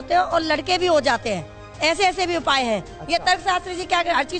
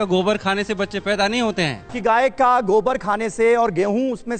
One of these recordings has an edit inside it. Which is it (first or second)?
second